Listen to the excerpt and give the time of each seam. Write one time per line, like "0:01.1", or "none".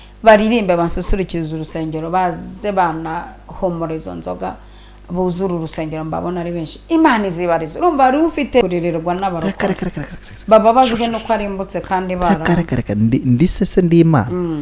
0:08.6